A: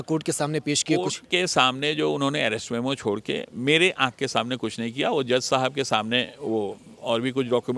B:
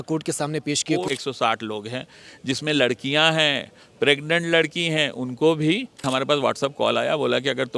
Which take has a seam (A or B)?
B